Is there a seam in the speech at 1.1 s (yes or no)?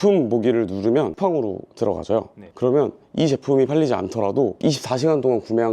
yes